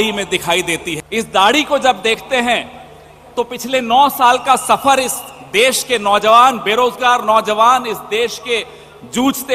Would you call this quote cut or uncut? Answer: cut